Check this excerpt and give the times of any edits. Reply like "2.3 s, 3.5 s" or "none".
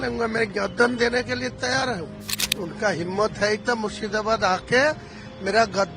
2.5 s